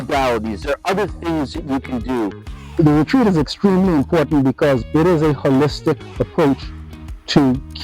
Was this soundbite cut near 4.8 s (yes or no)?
yes